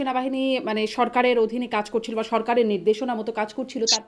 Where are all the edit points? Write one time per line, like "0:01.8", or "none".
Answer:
none